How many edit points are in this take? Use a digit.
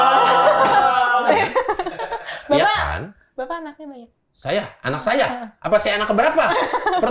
1